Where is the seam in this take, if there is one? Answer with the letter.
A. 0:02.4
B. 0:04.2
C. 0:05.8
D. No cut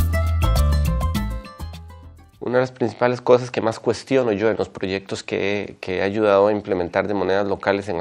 B